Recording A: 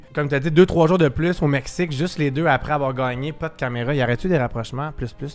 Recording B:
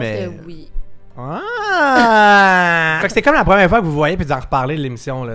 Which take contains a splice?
B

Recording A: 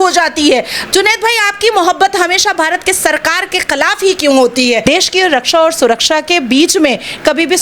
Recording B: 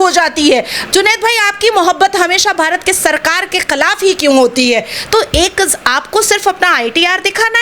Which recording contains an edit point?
A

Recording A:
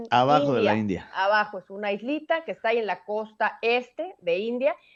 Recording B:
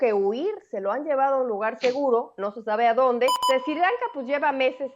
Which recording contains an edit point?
B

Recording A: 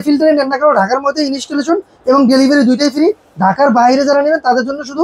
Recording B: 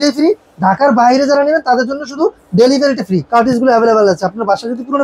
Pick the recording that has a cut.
B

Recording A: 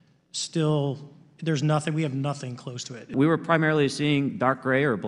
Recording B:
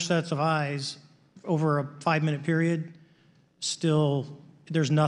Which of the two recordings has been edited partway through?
A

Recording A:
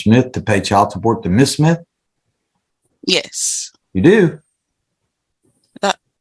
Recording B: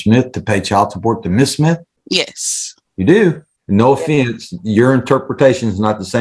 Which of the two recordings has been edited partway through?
B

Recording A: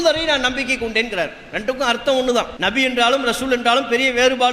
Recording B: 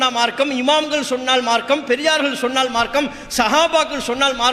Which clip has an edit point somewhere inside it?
A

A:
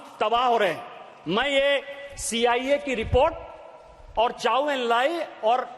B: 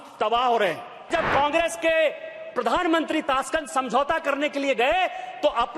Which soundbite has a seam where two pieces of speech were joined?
B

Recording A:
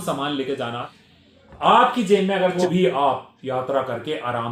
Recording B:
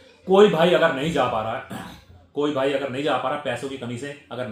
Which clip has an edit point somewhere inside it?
A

